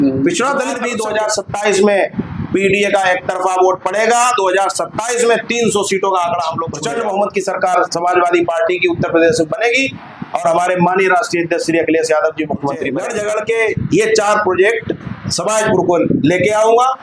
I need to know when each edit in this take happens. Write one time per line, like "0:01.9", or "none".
0:00.9
0:06.7
0:13.0

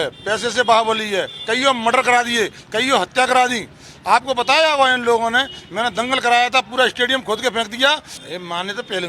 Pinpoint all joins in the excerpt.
0:08.1

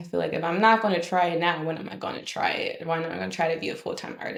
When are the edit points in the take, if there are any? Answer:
none

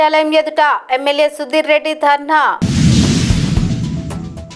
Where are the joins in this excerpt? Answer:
none

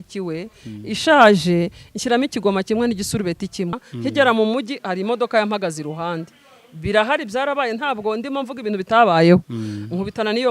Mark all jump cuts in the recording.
0:03.8

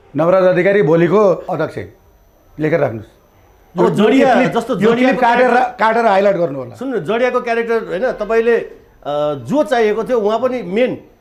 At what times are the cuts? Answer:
0:01.5

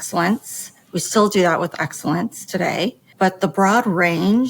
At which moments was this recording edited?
0:03.0

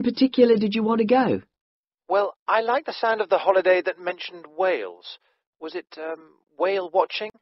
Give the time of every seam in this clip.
none

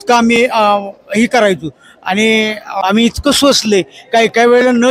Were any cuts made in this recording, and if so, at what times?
0:02.7

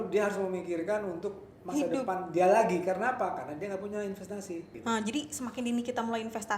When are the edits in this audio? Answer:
0:04.7

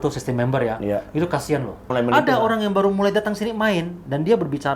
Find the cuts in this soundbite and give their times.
0:01.9

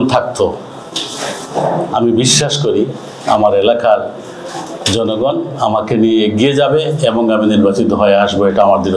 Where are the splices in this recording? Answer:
none

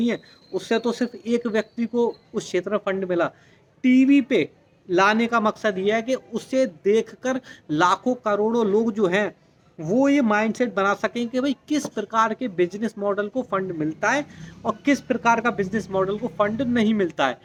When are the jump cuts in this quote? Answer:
none

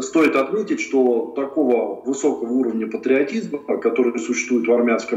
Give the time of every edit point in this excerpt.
none

